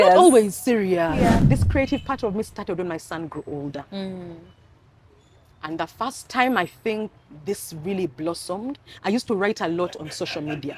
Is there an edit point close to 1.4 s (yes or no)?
yes